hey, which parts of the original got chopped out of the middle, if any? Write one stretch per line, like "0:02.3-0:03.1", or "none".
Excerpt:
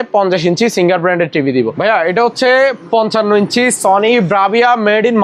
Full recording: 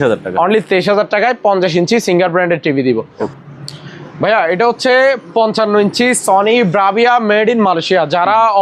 0:03.1-0:04.2